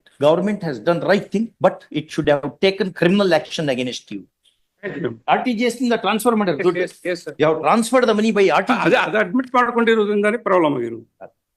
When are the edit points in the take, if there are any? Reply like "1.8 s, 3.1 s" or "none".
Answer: 5.0 s, 7.3 s

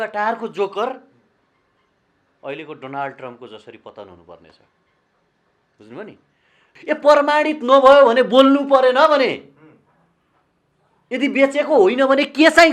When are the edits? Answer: 6.6 s

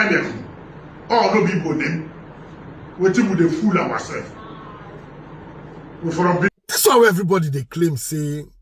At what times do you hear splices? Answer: 6.5 s

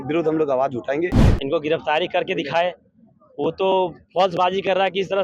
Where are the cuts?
1.3 s

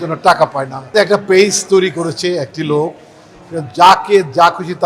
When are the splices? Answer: 0.9 s

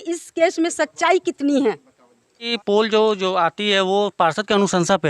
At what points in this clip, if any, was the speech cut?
2.5 s

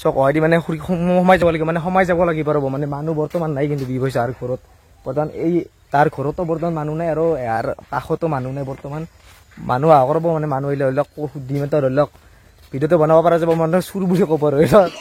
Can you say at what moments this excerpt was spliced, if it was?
none

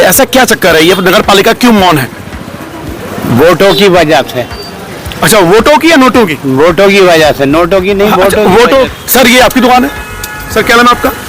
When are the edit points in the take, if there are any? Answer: 8.9 s

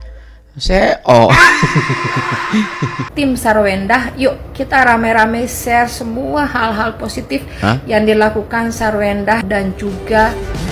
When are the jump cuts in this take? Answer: 3.1 s

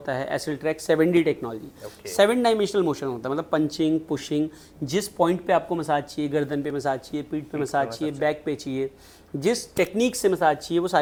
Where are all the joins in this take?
none

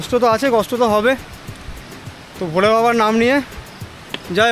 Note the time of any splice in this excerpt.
none

